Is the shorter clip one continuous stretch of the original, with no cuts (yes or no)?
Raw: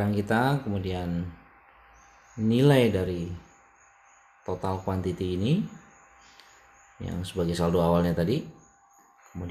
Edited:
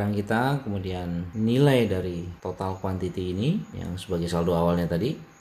no